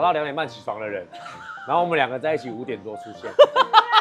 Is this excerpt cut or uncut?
uncut